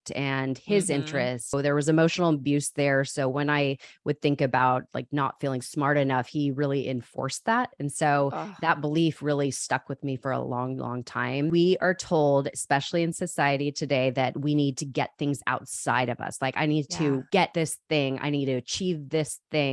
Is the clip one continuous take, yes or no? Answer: no